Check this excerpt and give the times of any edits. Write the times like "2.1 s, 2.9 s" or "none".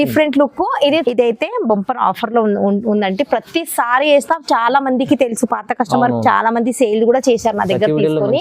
1.0 s

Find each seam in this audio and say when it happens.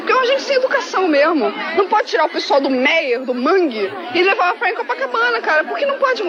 none

